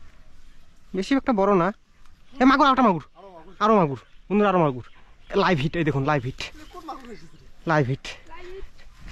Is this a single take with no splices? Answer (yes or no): yes